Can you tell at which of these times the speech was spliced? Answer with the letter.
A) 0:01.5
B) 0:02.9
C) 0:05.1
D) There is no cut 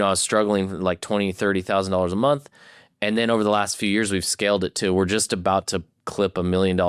D